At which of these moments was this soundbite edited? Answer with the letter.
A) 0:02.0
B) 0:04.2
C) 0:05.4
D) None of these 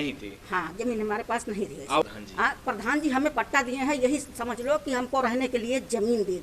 A